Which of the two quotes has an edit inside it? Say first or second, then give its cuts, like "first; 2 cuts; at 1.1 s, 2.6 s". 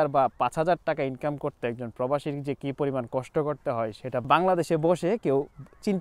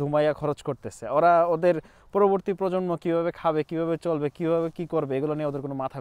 first; 1 cut; at 4.2 s